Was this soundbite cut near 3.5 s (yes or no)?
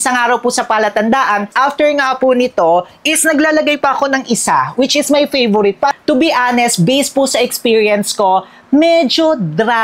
no